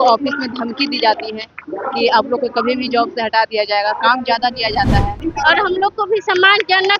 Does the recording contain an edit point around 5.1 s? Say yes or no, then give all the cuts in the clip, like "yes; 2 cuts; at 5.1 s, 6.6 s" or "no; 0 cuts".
yes; 1 cut; at 5.1 s